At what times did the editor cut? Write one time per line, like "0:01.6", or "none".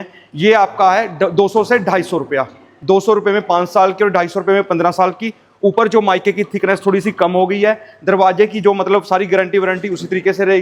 none